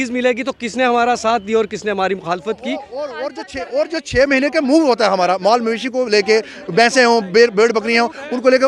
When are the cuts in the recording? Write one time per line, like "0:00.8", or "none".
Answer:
0:03.2